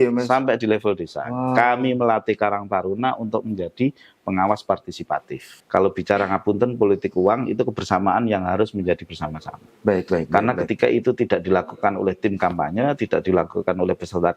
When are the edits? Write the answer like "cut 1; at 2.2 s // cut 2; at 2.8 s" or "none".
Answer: cut 1; at 5.5 s